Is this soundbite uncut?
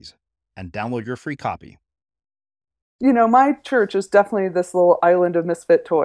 no; 1 cut; at 2.8 s

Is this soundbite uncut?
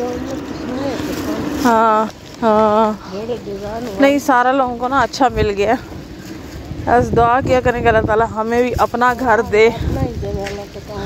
yes; 0 cuts

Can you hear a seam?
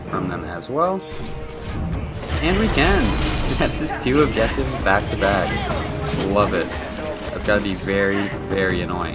no; 0 cuts

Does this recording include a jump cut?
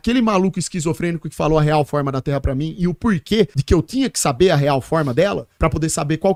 no; 0 cuts

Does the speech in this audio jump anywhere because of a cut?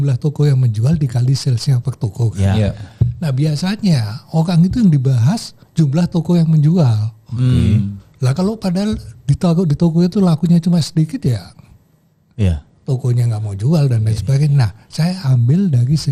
no; 0 cuts

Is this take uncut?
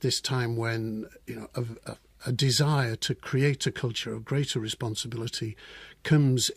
no; 1 cut; at 1.5 s

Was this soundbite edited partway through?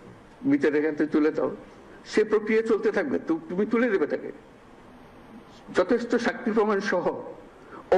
no; 0 cuts

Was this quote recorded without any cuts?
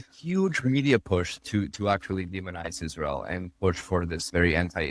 yes; 0 cuts

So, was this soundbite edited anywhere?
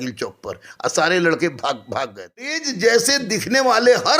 yes; 1 cut; at 2.6 s

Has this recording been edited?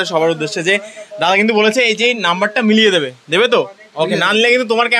no; 0 cuts

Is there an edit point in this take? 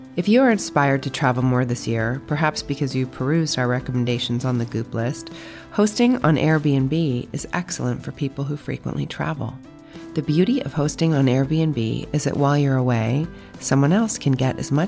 no; 0 cuts

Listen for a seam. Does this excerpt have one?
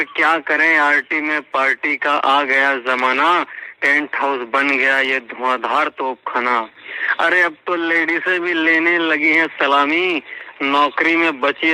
no; 0 cuts

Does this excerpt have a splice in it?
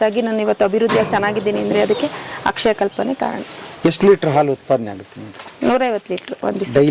yes; 1 cut; at 3.6 s

